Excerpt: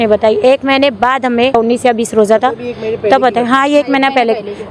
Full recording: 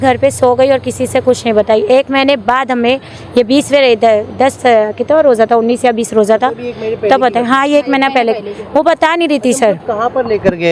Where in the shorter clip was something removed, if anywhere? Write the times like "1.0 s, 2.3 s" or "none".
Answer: 1.5 s